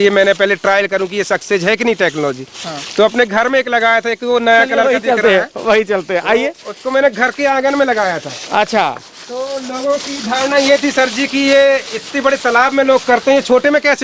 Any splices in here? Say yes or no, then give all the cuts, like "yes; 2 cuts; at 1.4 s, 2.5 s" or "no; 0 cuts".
no; 0 cuts